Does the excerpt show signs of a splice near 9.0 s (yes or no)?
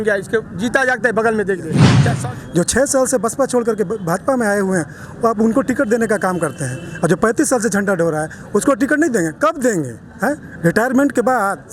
no